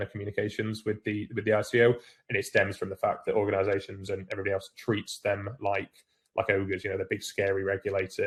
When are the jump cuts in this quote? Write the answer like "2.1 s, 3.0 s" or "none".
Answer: none